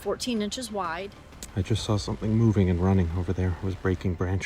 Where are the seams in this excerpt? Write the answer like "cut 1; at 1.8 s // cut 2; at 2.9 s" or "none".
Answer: cut 1; at 1.2 s